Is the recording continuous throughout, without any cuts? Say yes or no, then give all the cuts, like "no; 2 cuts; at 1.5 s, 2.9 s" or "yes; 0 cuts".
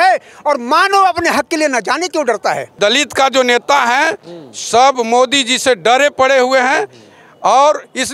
no; 1 cut; at 2.8 s